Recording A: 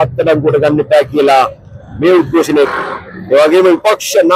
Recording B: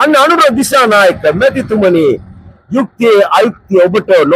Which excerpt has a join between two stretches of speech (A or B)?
A